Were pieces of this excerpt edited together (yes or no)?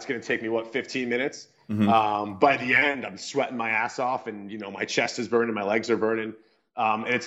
no